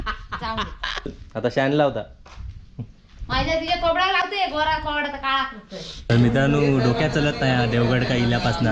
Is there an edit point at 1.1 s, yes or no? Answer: yes